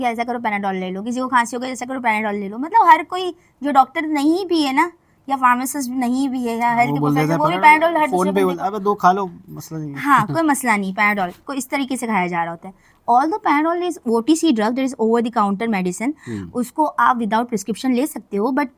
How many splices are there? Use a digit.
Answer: 0